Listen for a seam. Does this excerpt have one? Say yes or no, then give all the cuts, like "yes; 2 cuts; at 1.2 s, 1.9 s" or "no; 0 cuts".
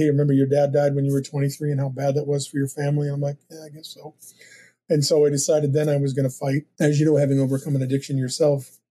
yes; 1 cut; at 6.7 s